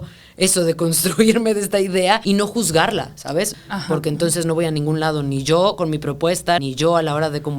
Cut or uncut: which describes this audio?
cut